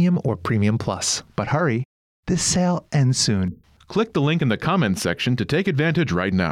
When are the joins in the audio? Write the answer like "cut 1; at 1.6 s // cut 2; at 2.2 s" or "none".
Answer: cut 1; at 1.2 s

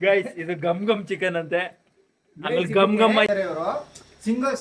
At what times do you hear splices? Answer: cut 1; at 3.3 s

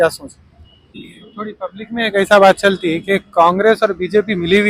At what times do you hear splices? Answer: cut 1; at 1.0 s

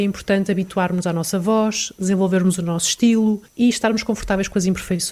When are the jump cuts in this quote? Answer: cut 1; at 3.5 s

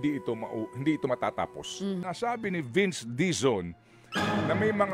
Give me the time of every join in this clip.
cut 1; at 2.0 s

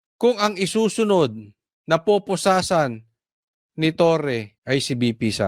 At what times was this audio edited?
cut 1; at 4.5 s

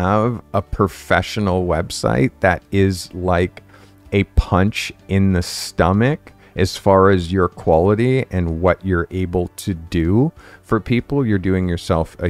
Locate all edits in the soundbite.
none

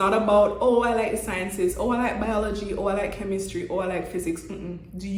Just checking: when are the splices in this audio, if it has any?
none

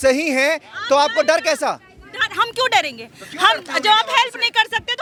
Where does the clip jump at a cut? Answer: none

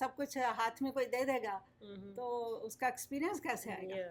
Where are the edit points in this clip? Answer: none

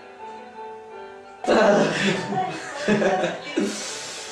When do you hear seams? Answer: none

